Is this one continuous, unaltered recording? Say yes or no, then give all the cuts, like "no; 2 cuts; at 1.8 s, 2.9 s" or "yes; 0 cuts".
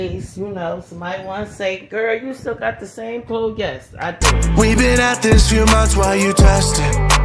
no; 1 cut; at 4.2 s